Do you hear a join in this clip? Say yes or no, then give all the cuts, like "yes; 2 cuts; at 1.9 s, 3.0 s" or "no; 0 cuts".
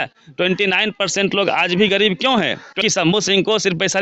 yes; 1 cut; at 2.8 s